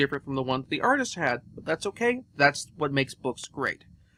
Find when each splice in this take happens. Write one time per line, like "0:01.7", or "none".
none

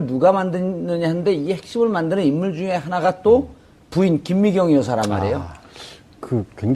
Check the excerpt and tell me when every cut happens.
0:01.8

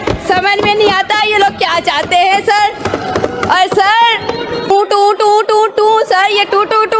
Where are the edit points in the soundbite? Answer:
0:04.7

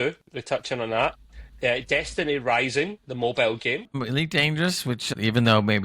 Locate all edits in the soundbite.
0:03.9
0:05.1

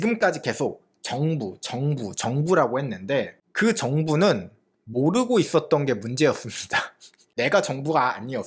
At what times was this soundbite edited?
0:07.3

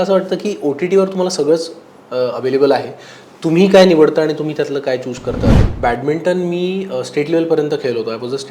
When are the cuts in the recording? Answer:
0:05.6

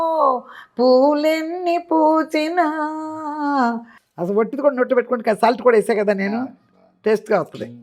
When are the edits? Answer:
0:03.9

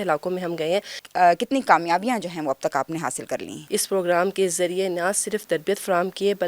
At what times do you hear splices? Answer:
0:01.0
0:03.6

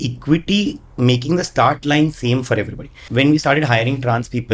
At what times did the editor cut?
0:03.0

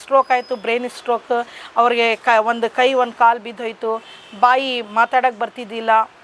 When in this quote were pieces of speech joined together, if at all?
none

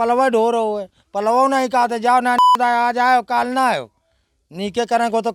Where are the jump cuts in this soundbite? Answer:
none

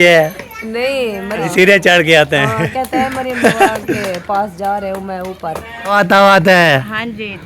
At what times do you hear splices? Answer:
0:01.5
0:05.9

